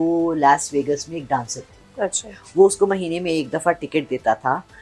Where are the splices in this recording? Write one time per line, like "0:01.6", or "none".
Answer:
none